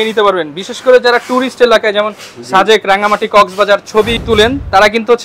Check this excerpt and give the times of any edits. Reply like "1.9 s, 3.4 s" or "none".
4.2 s